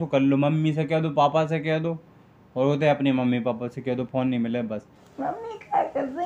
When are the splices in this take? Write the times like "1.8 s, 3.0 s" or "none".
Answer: 5.0 s